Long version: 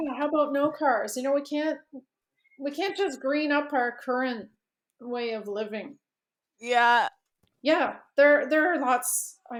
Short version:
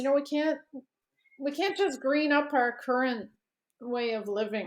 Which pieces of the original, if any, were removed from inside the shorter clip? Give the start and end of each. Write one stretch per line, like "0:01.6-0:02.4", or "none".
none